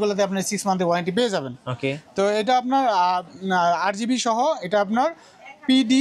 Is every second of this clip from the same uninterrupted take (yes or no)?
yes